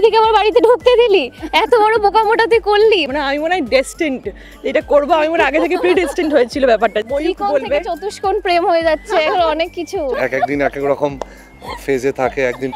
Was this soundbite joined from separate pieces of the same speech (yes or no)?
yes